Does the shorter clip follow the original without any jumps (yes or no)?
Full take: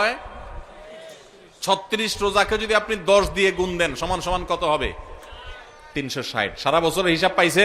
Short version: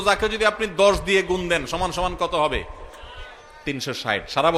yes